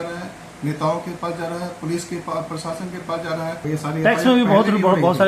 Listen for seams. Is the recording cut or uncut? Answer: cut